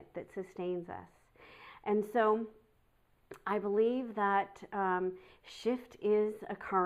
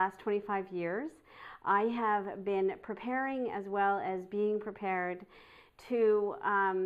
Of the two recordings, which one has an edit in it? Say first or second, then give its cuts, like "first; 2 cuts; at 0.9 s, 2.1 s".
second; 1 cut; at 3.5 s